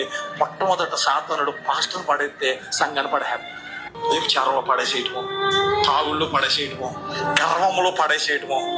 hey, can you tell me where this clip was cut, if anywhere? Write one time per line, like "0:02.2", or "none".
none